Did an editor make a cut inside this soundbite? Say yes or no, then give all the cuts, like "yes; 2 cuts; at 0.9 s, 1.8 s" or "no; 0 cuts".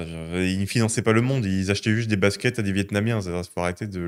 no; 0 cuts